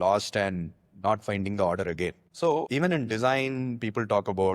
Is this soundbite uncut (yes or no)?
no